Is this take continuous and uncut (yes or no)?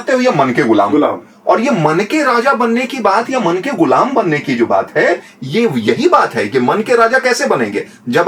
yes